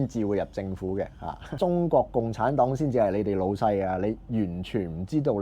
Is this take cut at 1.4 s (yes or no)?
yes